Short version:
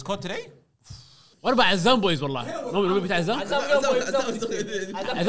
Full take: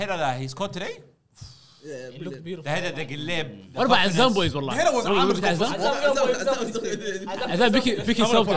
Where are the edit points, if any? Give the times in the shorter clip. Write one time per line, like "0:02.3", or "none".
0:01.3